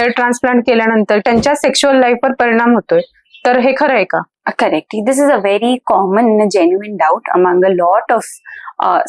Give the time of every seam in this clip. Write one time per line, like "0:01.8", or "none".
0:01.2